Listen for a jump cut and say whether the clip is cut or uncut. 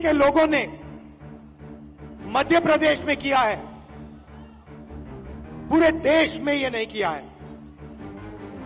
cut